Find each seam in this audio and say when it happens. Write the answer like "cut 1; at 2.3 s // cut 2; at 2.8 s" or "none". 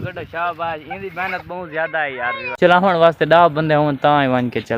cut 1; at 2.5 s